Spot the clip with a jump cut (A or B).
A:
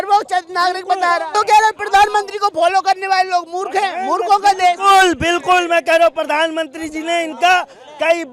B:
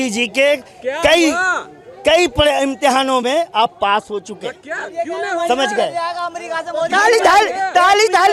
A